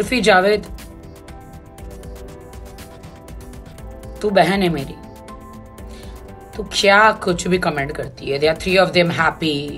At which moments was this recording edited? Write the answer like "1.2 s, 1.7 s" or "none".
none